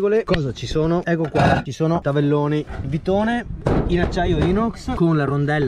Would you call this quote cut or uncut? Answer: cut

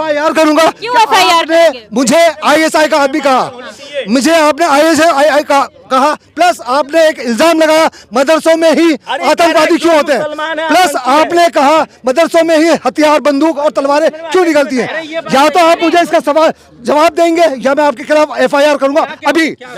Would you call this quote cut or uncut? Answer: uncut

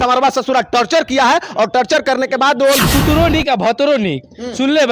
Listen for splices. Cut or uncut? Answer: cut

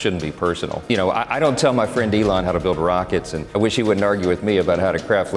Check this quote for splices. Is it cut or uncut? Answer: cut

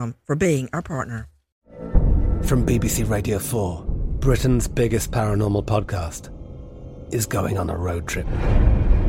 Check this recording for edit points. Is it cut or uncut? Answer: cut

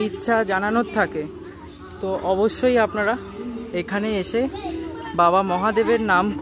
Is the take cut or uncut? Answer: uncut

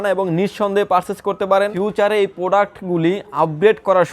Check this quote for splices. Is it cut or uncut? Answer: cut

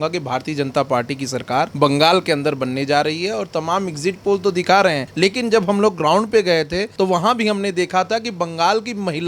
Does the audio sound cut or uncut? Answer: cut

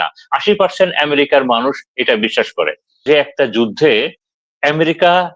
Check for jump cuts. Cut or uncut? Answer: cut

